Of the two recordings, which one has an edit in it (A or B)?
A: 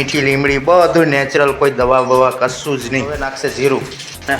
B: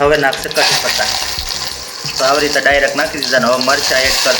A